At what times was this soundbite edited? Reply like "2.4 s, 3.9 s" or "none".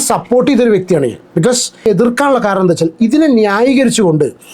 1.9 s